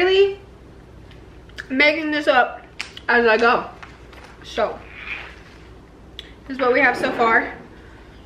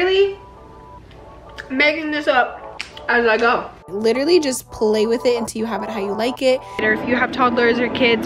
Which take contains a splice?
second; 2 cuts; at 3.8 s, 6.8 s

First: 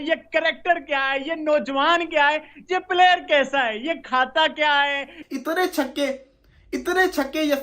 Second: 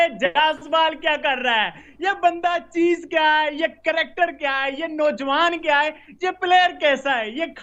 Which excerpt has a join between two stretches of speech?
first; 1 cut; at 5.2 s

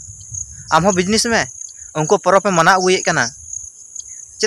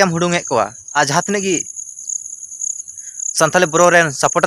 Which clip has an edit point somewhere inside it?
second; 1 cut; at 1.0 s

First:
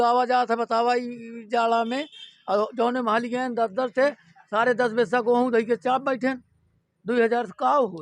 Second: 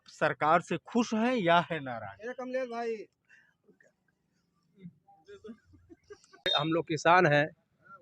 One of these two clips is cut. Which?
second; 1 cut; at 6.5 s

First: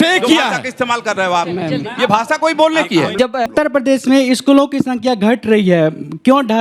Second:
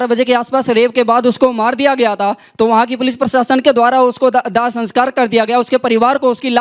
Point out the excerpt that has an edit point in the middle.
first; 1 cut; at 3.5 s

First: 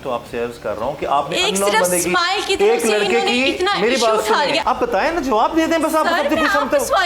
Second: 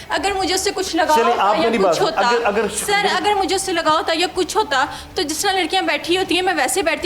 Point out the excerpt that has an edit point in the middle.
first; 1 cut; at 4.6 s

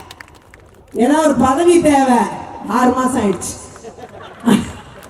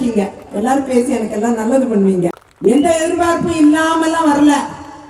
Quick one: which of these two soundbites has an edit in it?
second; 1 cut; at 2.5 s

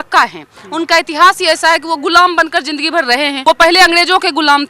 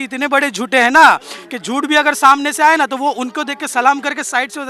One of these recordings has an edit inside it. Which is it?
first; 1 cut; at 3.4 s

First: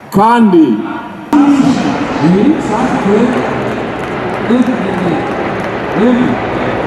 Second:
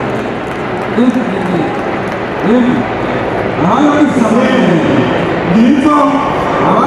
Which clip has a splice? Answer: first; 1 cut; at 1.3 s

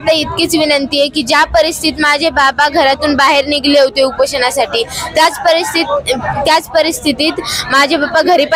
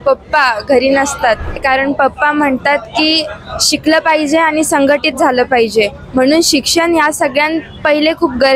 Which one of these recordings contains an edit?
second; 1 cut; at 1.6 s

